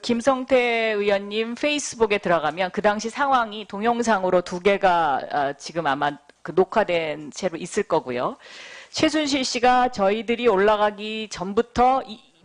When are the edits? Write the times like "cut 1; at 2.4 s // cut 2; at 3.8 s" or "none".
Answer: cut 1; at 2.8 s